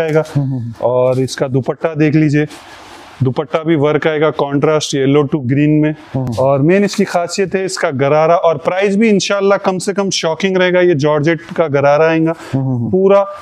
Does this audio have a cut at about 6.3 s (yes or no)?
no